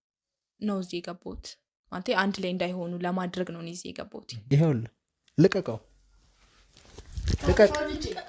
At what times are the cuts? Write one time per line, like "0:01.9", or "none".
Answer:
0:04.4